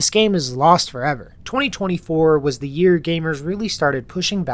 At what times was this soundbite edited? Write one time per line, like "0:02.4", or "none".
0:01.3